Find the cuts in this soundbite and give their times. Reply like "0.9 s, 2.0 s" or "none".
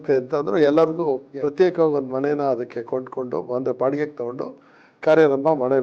1.2 s

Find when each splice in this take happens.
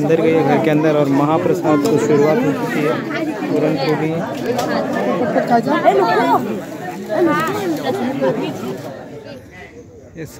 9.1 s

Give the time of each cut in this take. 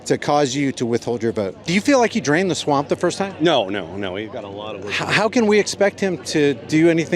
1.7 s

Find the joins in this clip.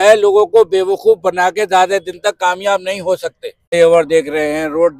3.7 s

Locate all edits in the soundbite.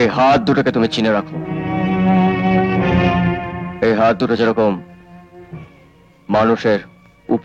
none

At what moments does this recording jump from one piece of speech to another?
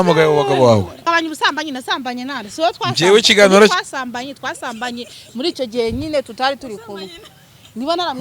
1.0 s

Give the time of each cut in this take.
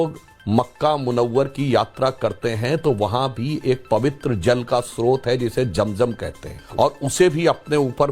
6.6 s

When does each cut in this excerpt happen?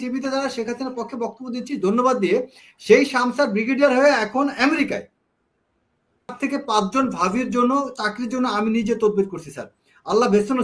6.3 s

